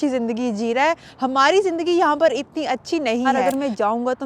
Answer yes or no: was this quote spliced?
yes